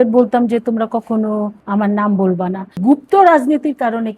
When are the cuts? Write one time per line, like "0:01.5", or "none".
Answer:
0:01.6
0:02.8